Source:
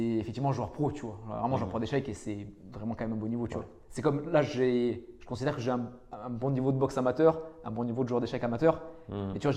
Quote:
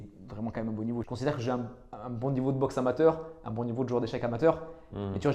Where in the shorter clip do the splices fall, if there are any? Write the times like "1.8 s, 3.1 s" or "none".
1.1 s

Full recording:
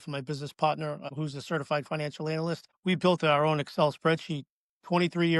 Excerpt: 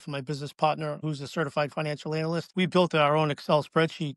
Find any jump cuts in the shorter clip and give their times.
1.0 s, 2.5 s

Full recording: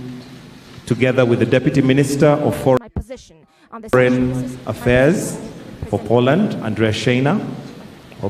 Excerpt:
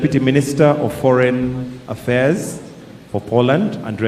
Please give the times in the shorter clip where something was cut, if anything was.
1.2 s

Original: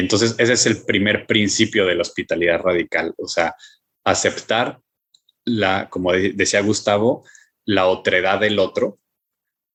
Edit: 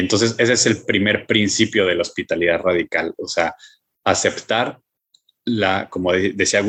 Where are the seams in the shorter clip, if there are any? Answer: none

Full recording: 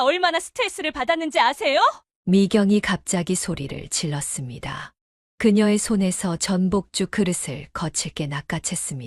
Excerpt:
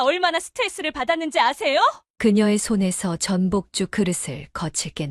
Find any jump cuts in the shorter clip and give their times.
2.1 s

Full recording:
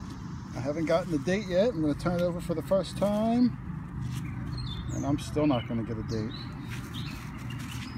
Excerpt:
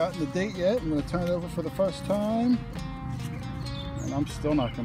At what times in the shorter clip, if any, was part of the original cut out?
none

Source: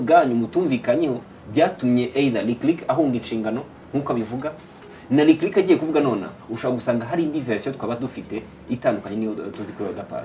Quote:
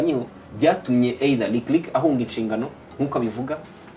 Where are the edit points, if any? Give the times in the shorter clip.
none

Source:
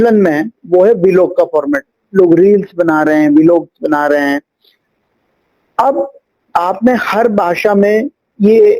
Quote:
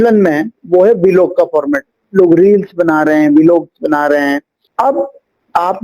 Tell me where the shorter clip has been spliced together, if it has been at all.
4.6 s

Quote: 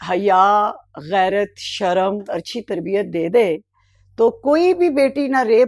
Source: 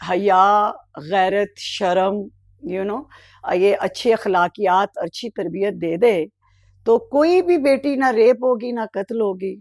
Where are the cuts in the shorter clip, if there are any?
2.3 s

